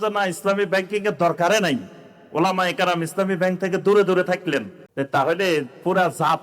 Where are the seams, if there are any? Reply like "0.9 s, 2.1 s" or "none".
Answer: 4.8 s